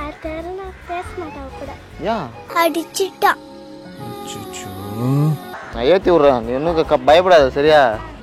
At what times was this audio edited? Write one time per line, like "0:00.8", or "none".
0:02.4
0:05.6